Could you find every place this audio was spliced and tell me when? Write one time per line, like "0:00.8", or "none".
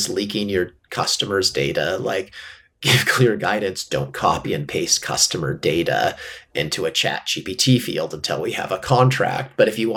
none